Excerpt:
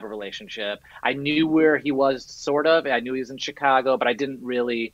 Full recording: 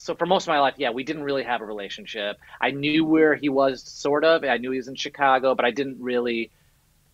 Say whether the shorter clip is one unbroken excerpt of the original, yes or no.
yes